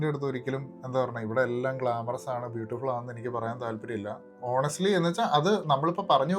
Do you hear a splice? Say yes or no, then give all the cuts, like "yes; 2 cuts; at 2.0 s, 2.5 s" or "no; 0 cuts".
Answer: no; 0 cuts